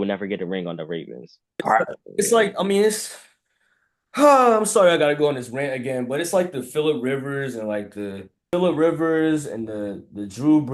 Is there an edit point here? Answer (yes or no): yes